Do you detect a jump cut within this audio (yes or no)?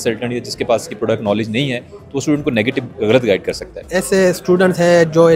yes